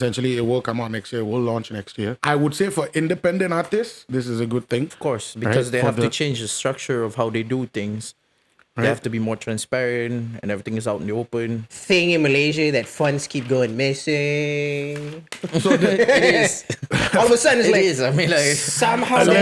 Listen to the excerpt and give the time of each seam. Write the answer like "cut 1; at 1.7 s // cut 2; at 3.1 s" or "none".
cut 1; at 4.9 s // cut 2; at 11.7 s